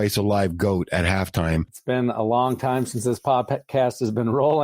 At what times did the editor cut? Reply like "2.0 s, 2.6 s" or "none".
1.7 s